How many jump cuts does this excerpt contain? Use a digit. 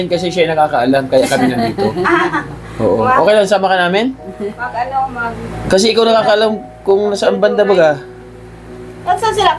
0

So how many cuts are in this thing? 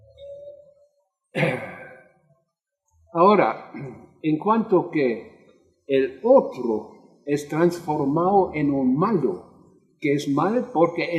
1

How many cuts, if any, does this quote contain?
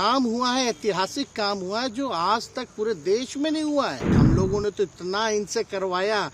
1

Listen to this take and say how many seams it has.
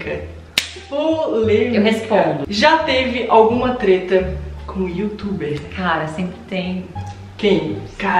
1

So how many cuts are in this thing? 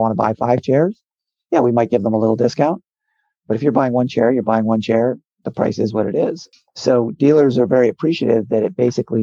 1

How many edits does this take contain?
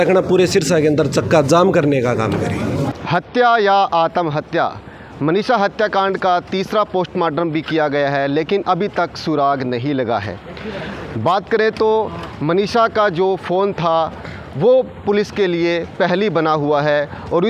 1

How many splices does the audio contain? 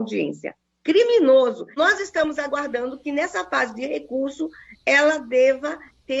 1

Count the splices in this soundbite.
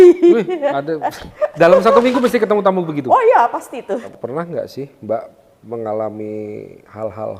1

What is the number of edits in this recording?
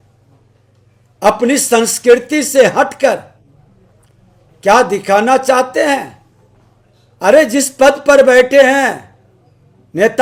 0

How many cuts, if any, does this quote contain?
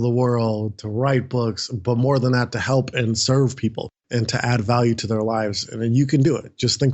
0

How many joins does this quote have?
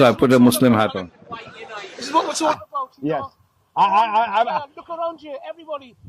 1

